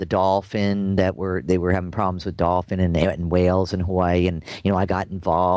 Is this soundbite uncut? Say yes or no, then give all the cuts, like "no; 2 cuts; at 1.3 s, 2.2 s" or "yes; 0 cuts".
yes; 0 cuts